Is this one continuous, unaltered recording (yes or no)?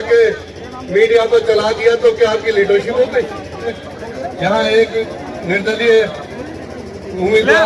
no